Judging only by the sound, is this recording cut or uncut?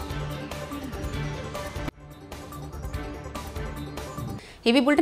uncut